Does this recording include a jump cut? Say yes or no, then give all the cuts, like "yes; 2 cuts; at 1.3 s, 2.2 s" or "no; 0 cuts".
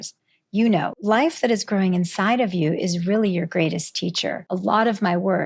yes; 2 cuts; at 0.9 s, 4.4 s